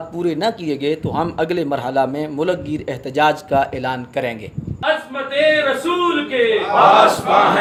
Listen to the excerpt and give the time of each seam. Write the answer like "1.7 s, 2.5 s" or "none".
none